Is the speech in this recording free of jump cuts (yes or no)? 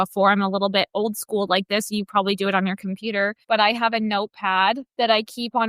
no